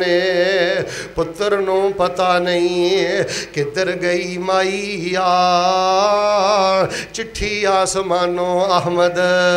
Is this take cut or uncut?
uncut